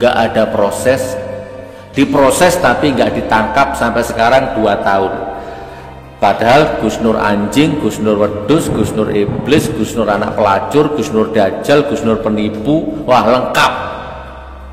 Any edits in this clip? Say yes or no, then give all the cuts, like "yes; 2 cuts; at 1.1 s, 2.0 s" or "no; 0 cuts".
no; 0 cuts